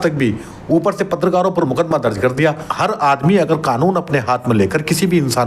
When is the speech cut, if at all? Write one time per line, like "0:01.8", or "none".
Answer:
0:02.6